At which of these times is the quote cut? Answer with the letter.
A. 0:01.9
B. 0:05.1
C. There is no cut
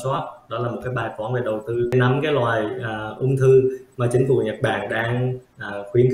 A